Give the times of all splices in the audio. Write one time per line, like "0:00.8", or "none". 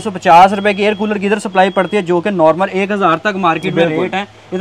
none